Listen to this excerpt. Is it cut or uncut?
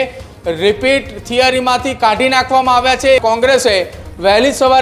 cut